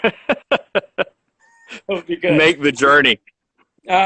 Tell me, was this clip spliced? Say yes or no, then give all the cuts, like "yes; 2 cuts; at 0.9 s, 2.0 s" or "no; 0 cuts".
no; 0 cuts